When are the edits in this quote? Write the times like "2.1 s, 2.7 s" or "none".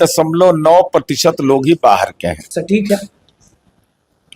2.5 s